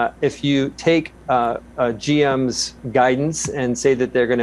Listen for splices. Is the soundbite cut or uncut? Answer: uncut